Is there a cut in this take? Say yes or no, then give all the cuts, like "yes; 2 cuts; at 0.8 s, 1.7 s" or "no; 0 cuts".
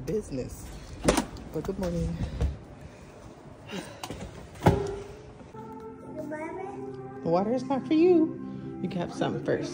no; 0 cuts